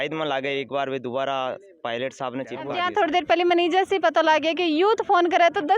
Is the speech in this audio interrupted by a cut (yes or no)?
yes